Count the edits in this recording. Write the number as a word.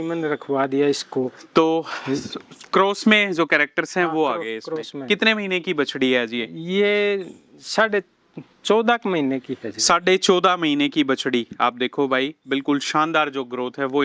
zero